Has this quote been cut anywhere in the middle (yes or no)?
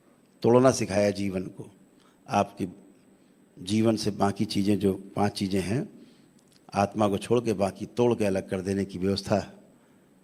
no